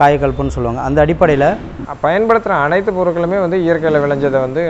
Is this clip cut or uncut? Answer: cut